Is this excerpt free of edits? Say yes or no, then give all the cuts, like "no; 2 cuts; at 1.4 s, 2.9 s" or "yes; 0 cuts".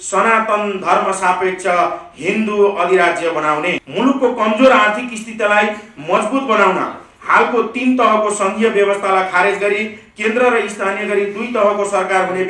no; 1 cut; at 3.8 s